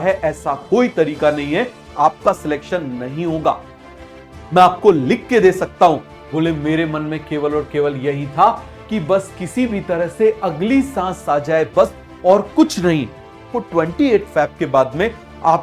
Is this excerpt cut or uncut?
cut